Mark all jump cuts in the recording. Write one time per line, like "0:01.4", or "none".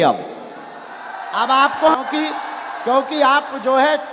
0:02.0